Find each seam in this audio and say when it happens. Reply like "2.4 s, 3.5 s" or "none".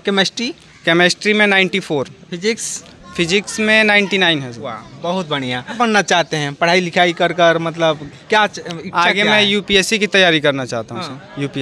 none